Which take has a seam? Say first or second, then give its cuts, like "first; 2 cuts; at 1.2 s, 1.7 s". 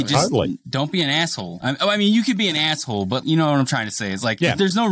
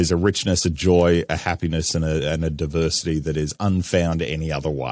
first; 1 cut; at 1.5 s